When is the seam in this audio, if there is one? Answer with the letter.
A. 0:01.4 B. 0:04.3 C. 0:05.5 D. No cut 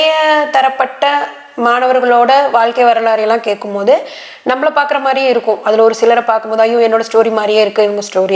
D